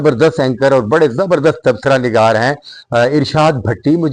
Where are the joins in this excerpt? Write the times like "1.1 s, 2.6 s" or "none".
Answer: none

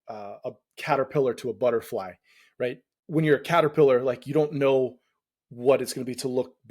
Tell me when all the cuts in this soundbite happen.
2.9 s

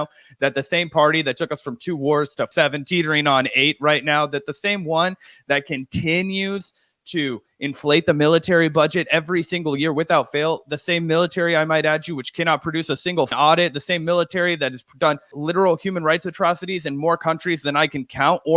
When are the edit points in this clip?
2.5 s, 13.3 s, 15.3 s

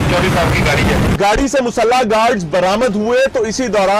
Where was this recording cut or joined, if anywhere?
1.1 s

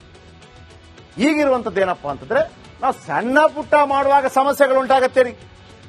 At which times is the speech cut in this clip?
1.0 s

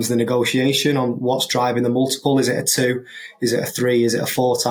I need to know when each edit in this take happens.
none

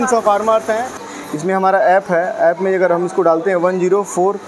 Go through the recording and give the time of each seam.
1.0 s

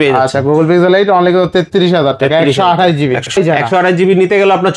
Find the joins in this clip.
3.3 s

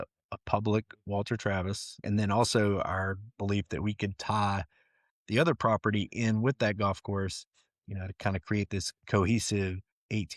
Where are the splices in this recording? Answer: 2.0 s

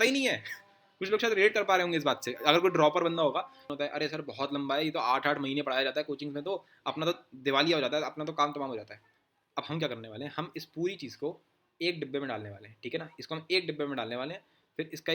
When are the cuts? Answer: 3.6 s

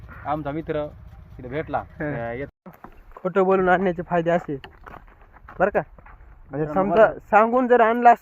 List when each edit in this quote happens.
2.5 s

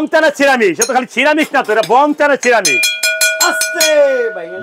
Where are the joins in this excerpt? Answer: none

